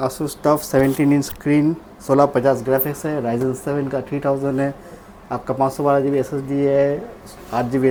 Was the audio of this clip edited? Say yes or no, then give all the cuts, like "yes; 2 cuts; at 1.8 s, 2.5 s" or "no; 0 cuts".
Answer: no; 0 cuts